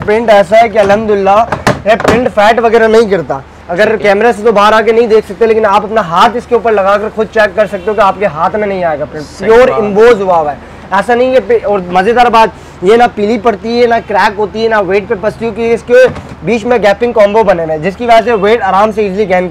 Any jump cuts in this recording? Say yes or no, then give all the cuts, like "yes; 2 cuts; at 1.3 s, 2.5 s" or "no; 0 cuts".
no; 0 cuts